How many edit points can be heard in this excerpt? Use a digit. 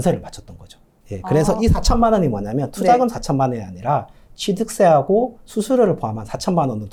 0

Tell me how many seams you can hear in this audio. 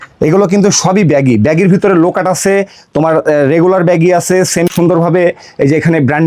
1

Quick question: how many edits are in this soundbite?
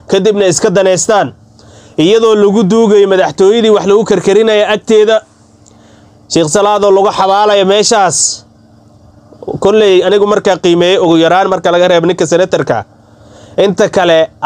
0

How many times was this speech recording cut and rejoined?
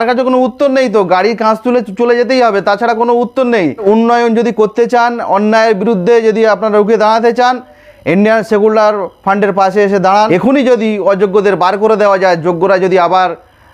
2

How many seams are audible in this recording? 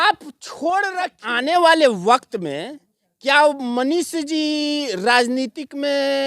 1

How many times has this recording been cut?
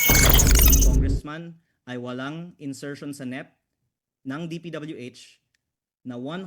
1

